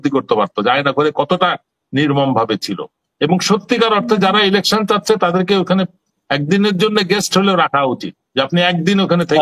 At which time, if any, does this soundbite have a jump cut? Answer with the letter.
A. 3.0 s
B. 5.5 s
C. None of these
C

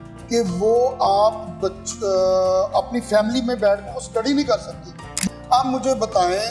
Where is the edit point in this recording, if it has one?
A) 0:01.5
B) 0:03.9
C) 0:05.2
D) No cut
C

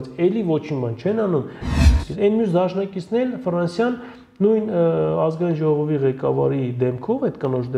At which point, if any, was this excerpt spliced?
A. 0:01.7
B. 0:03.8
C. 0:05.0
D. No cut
A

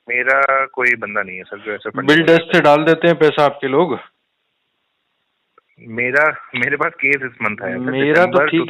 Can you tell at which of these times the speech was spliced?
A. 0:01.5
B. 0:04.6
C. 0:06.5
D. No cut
D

